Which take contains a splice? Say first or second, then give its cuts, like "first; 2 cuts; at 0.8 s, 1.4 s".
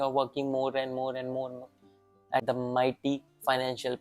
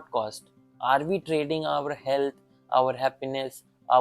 first; 1 cut; at 2.4 s